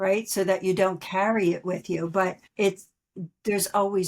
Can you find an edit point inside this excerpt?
yes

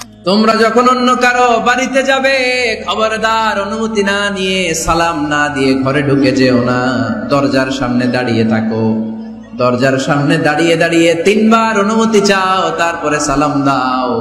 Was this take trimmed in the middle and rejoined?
no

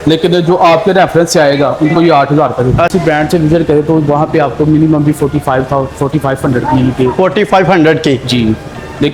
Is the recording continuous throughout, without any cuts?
no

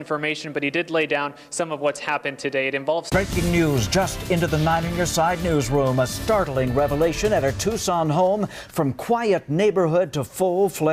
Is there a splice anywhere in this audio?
no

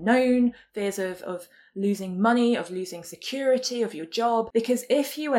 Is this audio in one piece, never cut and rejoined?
no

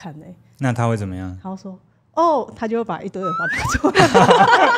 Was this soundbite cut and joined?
no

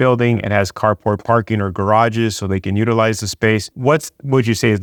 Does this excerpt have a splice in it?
no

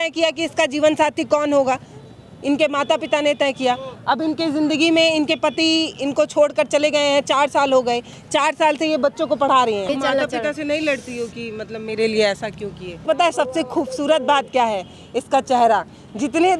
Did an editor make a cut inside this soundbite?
yes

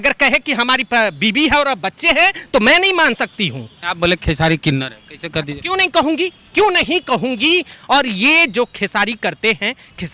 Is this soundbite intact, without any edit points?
no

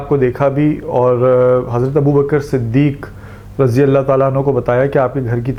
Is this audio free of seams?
yes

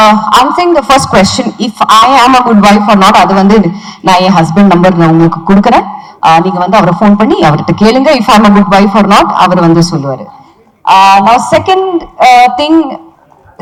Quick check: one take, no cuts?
yes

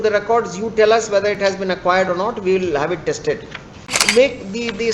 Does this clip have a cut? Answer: yes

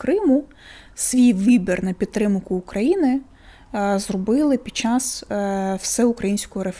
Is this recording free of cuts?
yes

